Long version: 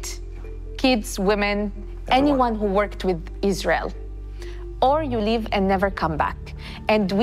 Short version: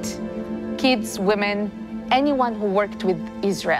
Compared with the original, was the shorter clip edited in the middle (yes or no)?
no